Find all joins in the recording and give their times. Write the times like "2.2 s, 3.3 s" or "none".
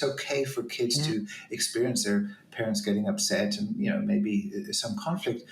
none

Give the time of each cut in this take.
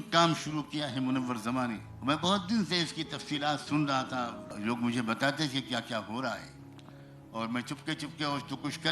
1.9 s, 4.4 s

